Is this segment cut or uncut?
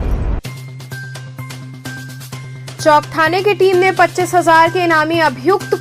cut